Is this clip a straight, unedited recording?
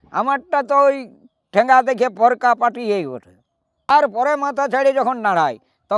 no; 1 cut; at 3.9 s

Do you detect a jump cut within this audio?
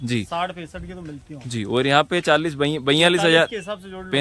no; 0 cuts

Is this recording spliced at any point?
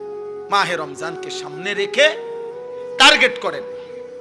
no; 0 cuts

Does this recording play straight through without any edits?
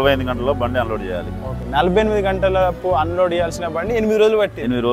yes; 0 cuts

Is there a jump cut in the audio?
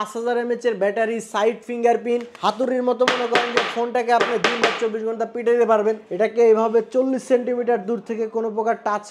yes; 2 cuts; at 2.3 s, 6.0 s

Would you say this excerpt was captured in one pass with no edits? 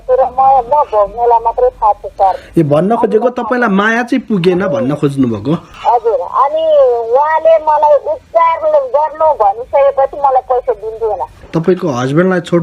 no; 2 cuts; at 5.7 s, 11.4 s

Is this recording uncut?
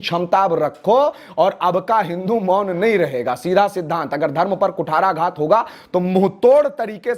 yes; 0 cuts

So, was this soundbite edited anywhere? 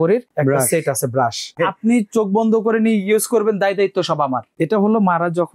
yes; 2 cuts; at 1.7 s, 4.5 s

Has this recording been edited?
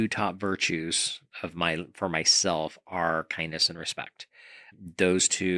yes; 1 cut; at 4.7 s

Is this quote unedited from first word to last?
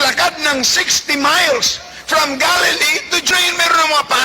no; 1 cut; at 3.3 s

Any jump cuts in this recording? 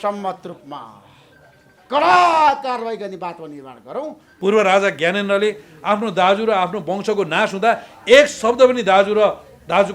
yes; 1 cut; at 4.2 s

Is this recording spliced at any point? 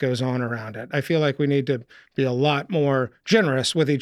no; 0 cuts

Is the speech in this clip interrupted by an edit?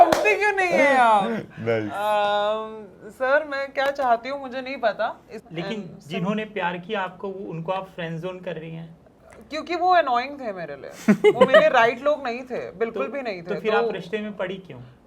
yes; 1 cut; at 5.4 s

